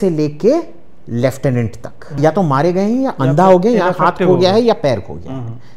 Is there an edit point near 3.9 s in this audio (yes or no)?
no